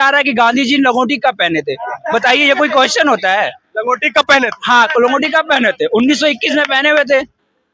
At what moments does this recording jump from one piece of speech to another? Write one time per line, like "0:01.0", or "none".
none